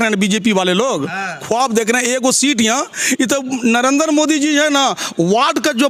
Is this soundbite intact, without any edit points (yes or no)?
yes